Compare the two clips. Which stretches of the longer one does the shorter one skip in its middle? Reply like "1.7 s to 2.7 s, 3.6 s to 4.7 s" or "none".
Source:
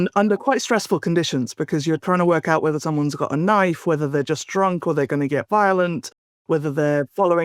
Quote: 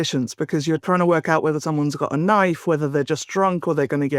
none